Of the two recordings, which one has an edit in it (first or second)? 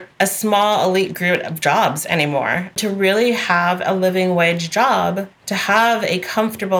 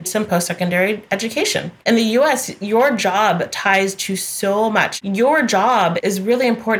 second